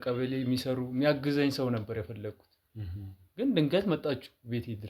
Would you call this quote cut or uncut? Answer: uncut